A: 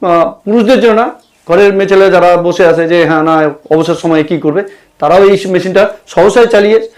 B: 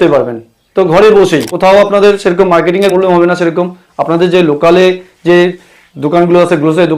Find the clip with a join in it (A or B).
B